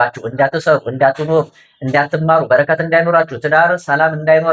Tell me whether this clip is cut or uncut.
uncut